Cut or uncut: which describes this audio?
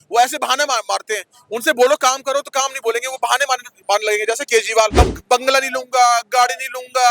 cut